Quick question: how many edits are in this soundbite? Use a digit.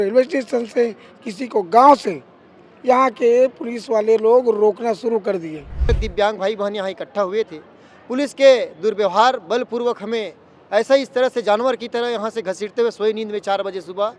1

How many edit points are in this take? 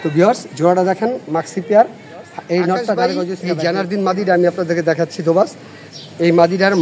1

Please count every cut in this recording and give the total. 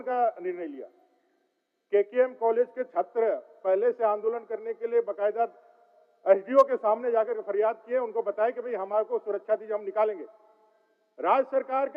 0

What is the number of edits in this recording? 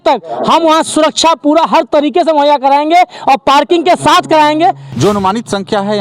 1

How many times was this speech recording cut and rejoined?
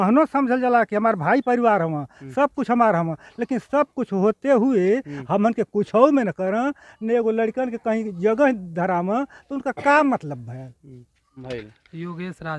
1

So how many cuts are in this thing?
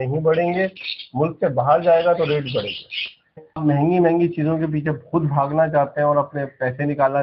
1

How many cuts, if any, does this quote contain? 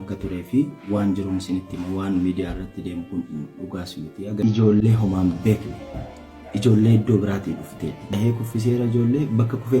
2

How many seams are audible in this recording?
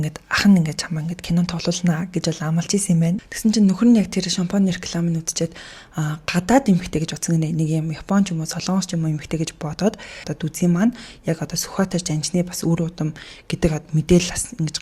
2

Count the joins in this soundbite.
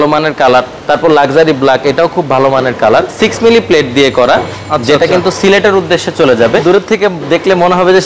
2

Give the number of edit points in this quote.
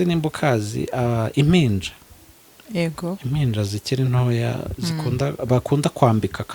0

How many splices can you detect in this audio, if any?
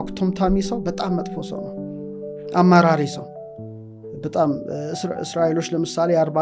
0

